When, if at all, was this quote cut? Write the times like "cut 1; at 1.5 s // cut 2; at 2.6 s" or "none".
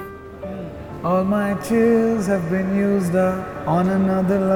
none